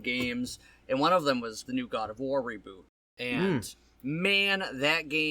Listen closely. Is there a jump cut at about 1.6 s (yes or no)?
yes